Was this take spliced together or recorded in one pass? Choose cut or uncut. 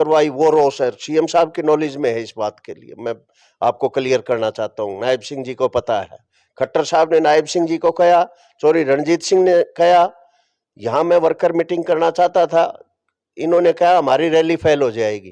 uncut